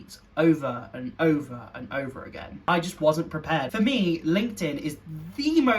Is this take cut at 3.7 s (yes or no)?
yes